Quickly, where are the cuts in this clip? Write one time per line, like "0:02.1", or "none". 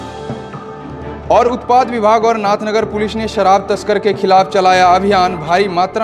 0:00.9